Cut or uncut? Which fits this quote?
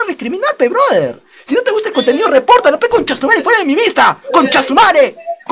uncut